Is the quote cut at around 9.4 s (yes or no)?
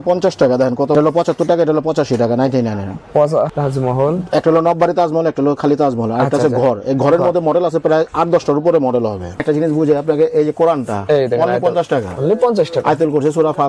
yes